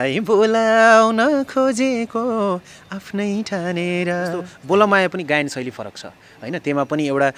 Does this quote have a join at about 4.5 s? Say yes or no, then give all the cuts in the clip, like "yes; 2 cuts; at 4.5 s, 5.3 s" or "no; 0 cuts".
yes; 1 cut; at 4.5 s